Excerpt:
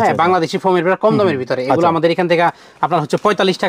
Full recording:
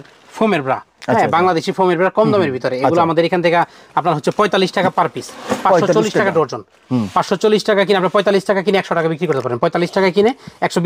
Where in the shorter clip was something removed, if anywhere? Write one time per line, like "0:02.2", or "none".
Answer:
none